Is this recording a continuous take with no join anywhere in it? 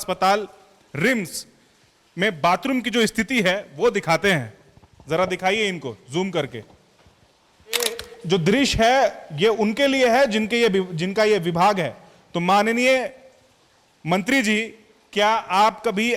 no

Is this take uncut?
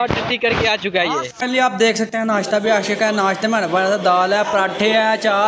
no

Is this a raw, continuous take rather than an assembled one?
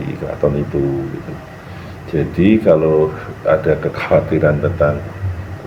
yes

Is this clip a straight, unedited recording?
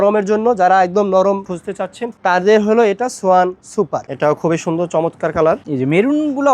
no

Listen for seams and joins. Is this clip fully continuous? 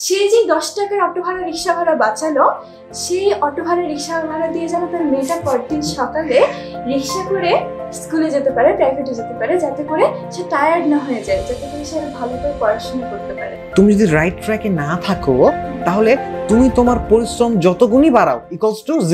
no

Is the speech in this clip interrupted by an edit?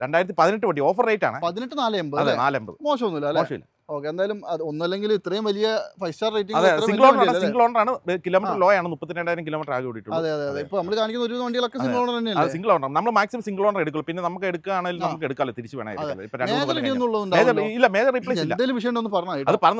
no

